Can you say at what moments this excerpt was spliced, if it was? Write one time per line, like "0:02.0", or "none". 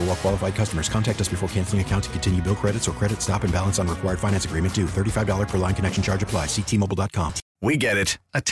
0:07.4

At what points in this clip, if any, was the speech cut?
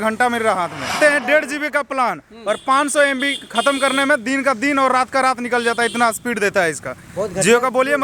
0:01.0

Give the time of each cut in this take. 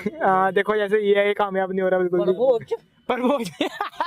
0:03.1

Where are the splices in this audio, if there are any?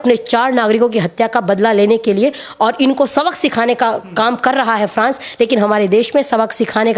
none

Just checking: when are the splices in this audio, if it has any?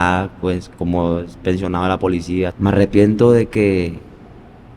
0:02.5

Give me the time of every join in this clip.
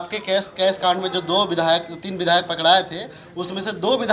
none

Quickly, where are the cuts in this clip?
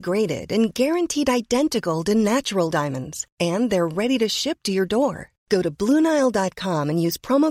none

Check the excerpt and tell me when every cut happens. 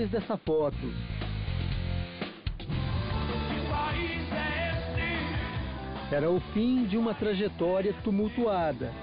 0:07.8

